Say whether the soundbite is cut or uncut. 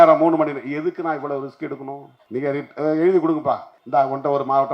cut